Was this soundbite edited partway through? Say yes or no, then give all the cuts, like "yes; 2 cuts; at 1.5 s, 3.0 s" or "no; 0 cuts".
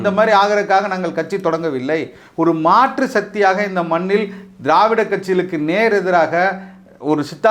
no; 0 cuts